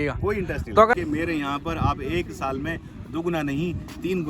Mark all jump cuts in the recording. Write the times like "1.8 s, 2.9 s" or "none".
0.9 s